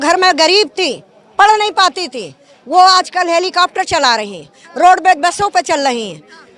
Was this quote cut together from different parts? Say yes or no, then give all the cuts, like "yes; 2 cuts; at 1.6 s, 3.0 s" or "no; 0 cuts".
no; 0 cuts